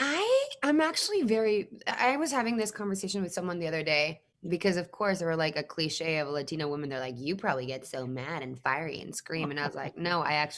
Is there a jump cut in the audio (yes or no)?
no